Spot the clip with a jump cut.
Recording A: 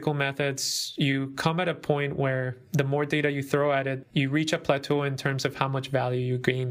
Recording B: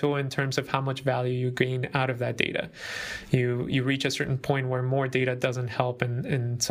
A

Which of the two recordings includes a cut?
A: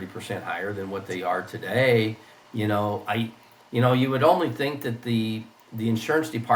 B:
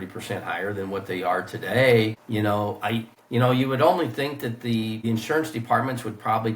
B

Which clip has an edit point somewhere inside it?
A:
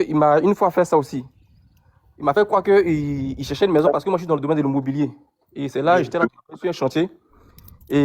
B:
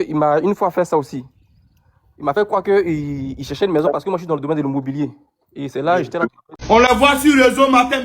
B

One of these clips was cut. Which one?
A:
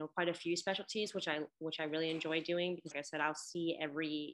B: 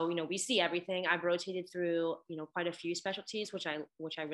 A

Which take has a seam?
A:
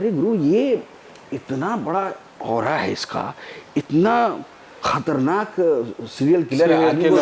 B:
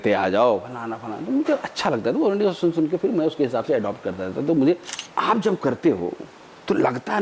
B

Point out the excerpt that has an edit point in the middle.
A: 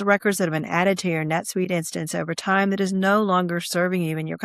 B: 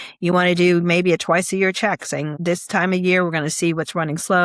B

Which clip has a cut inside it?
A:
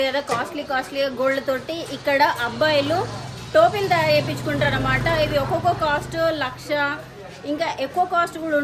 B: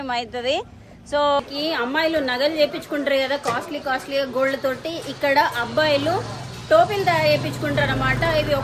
B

